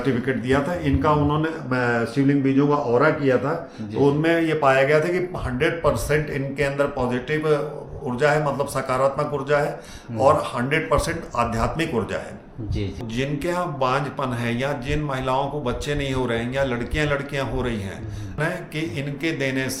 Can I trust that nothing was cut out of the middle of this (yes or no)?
no